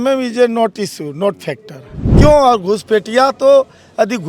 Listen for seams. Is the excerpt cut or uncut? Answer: cut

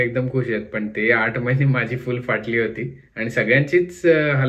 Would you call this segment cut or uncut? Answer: uncut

